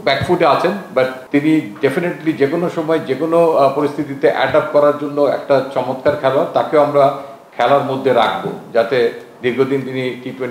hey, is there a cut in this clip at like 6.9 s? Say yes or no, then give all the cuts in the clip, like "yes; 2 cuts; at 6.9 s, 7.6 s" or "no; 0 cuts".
no; 1 cut; at 1.2 s